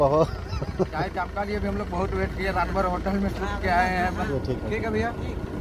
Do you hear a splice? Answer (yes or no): yes